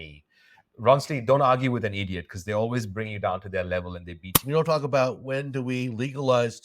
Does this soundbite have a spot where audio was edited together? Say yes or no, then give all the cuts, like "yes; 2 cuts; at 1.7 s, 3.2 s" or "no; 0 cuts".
yes; 1 cut; at 4.3 s